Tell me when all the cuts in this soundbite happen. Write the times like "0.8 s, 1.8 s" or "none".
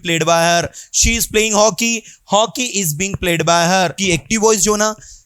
4.0 s